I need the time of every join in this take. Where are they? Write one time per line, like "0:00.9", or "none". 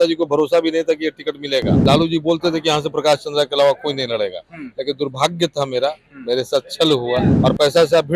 0:01.7
0:07.3